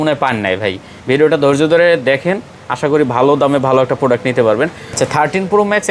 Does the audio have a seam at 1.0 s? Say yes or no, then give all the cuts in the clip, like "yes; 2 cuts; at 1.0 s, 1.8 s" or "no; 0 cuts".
no; 1 cut; at 4.9 s